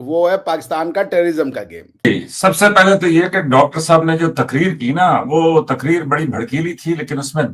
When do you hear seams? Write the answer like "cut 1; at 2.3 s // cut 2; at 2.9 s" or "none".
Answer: cut 1; at 2.1 s